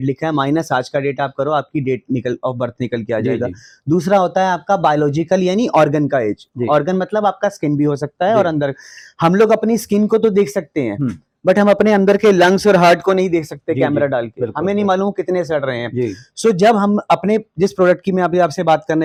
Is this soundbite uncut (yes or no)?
yes